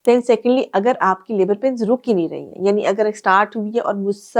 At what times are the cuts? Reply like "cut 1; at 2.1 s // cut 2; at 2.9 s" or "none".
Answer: none